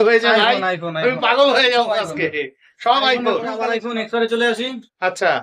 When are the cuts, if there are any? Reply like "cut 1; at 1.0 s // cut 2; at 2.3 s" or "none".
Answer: cut 1; at 3.6 s